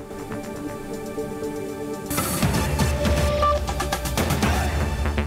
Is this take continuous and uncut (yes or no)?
yes